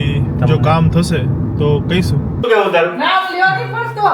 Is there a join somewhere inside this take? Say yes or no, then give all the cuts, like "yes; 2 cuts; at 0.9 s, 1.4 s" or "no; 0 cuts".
yes; 1 cut; at 2.4 s